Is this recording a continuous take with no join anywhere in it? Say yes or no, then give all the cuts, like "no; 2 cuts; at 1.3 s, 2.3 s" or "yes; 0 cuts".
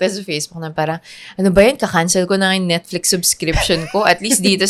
yes; 0 cuts